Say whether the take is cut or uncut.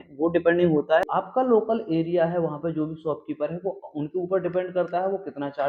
cut